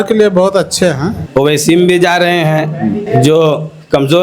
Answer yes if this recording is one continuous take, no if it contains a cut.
no